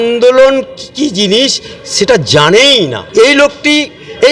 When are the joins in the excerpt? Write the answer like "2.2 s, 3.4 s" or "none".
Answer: 3.0 s